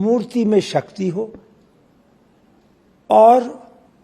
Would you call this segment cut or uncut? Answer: uncut